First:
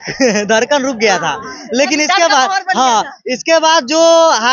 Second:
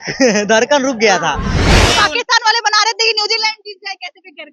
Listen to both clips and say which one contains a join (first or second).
second